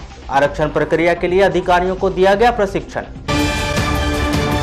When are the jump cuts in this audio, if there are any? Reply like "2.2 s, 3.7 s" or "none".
none